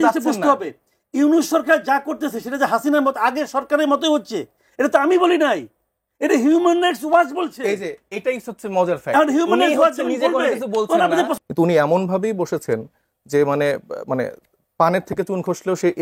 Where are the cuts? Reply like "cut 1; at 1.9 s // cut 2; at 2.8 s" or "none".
cut 1; at 11.3 s